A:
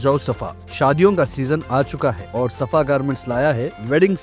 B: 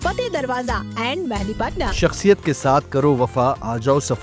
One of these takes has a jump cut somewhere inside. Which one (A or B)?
B